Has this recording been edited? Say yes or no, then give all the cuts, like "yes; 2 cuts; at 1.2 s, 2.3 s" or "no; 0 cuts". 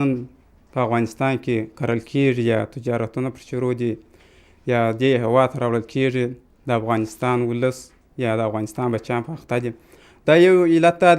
no; 0 cuts